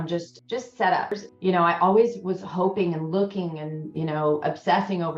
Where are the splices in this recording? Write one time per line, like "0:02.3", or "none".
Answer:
0:01.1